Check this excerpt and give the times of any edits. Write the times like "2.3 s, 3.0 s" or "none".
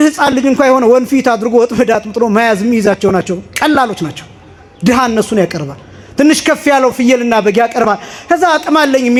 none